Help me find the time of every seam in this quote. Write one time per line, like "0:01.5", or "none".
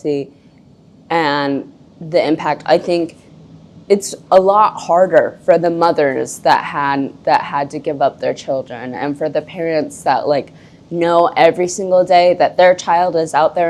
none

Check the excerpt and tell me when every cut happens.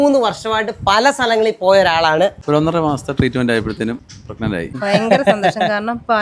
0:02.4
0:04.6

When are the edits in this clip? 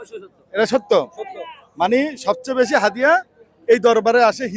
none

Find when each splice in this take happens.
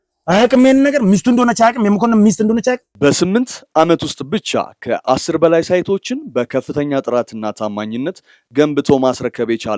none

